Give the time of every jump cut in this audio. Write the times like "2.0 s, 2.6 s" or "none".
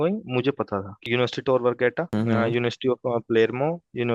1.0 s, 2.0 s